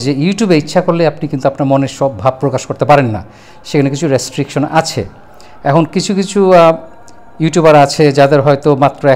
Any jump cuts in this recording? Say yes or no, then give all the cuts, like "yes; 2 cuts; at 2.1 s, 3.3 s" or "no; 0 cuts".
no; 0 cuts